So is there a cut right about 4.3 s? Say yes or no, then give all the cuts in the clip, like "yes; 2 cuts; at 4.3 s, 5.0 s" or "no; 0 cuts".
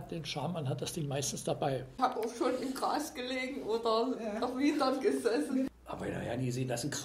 no; 2 cuts; at 1.9 s, 5.7 s